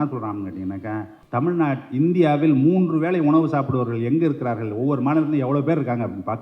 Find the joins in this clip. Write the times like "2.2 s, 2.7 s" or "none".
1.2 s